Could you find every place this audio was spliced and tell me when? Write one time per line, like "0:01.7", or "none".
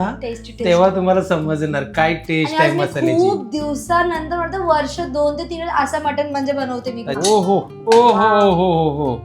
0:07.0

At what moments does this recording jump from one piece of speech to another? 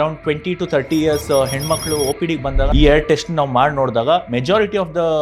0:02.7

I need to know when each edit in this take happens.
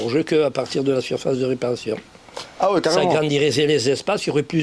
none

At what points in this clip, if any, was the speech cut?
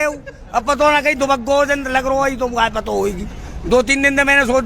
none

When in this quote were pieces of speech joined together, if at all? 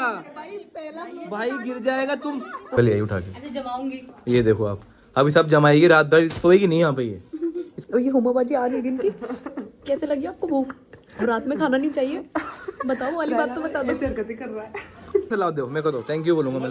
0:02.7
0:07.7
0:15.3

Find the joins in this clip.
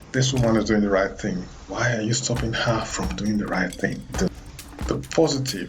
0:04.3

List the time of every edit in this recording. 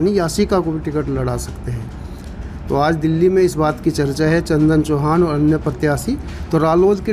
none

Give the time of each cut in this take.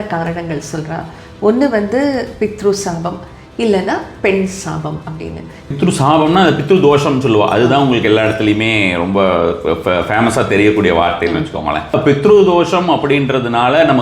0:05.7
0:11.9

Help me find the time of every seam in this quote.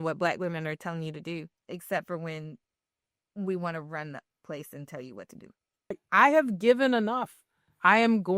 0:01.6
0:06.0

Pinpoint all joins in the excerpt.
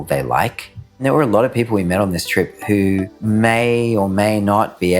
0:01.0
0:03.1

